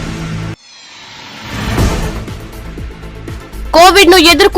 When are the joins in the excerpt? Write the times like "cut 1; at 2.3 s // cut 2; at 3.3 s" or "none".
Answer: cut 1; at 3.5 s